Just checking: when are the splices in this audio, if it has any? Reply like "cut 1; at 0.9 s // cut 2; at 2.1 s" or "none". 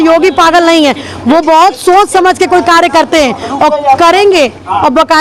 none